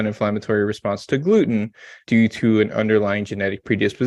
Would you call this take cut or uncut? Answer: cut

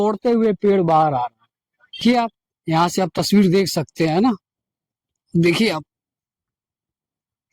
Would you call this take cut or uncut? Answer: cut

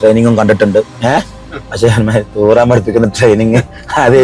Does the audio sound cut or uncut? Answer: uncut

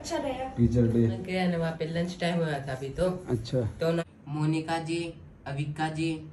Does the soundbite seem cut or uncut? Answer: cut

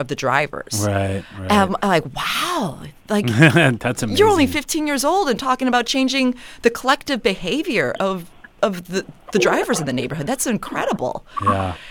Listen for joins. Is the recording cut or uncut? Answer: uncut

